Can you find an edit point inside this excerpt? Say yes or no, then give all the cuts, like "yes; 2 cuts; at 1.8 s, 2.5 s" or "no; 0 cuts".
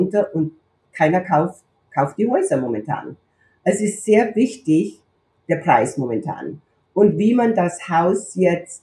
no; 0 cuts